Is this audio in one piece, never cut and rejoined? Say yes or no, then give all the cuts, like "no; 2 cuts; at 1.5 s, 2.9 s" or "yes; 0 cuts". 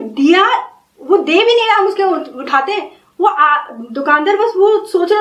yes; 0 cuts